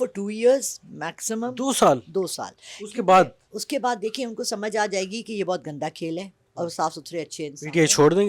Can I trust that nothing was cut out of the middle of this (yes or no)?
yes